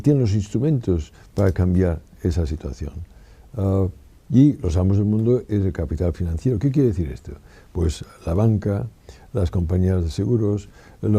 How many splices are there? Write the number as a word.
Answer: one